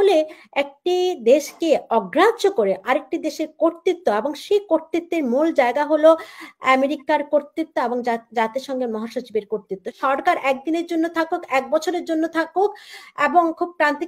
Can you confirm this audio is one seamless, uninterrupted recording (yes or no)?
no